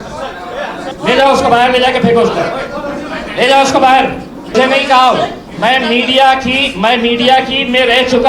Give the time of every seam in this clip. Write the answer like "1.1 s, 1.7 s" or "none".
0.9 s, 4.5 s